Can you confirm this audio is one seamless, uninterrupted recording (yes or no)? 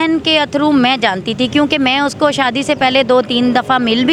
yes